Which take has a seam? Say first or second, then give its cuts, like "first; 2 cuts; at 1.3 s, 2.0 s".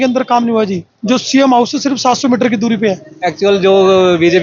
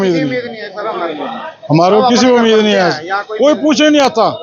first; 1 cut; at 3.0 s